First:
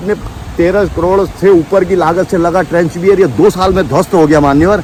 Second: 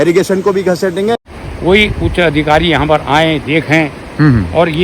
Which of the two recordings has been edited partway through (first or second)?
second